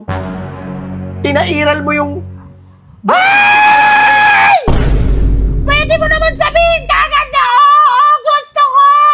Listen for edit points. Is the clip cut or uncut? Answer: uncut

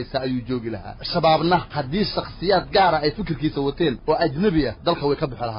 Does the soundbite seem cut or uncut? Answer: cut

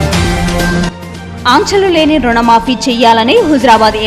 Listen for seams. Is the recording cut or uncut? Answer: cut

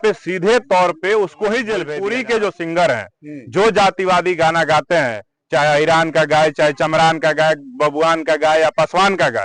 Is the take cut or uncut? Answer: cut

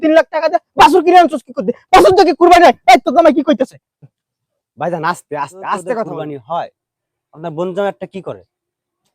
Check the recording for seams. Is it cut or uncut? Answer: cut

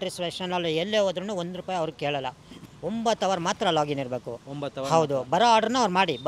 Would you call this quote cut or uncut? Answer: cut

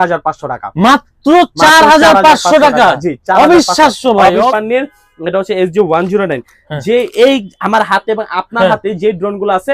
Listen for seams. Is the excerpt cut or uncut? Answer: cut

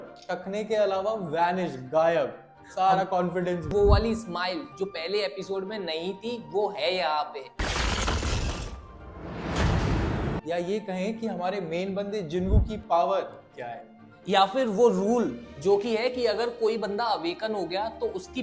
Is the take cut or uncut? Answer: cut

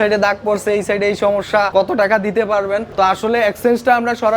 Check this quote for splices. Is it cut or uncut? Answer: cut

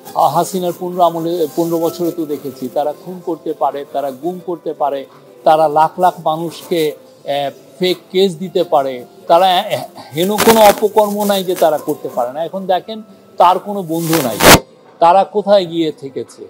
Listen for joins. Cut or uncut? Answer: uncut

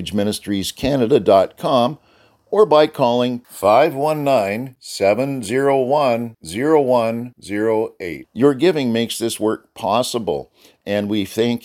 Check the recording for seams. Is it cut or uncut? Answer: uncut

